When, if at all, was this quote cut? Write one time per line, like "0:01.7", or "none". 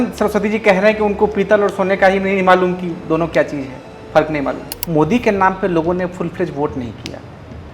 0:04.6